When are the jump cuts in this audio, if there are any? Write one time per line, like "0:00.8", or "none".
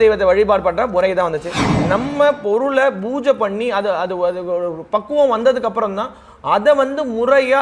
0:01.6